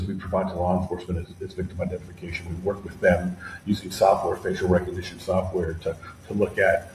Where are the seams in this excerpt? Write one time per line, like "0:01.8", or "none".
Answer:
none